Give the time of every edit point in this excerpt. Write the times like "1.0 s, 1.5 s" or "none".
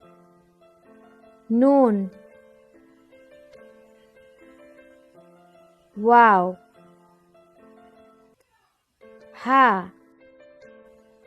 1.2 s